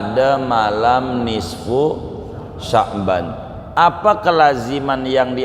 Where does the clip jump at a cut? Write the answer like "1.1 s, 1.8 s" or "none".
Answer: 3.7 s